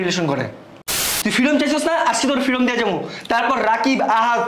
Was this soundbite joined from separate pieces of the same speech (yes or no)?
yes